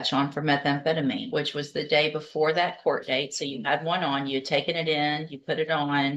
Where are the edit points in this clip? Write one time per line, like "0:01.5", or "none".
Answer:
0:01.2